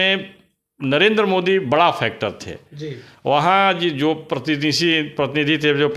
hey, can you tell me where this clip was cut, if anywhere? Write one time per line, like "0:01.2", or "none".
none